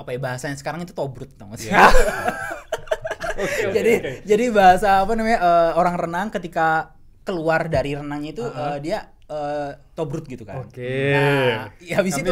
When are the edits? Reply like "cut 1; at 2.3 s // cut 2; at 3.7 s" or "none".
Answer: none